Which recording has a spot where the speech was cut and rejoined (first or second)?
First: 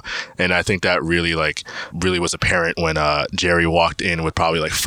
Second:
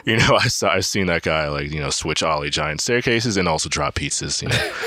first